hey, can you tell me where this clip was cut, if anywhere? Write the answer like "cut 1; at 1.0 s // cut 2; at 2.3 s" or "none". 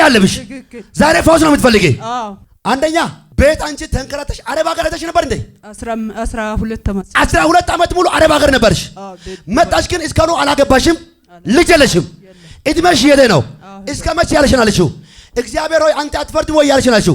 cut 1; at 2.4 s // cut 2; at 3.2 s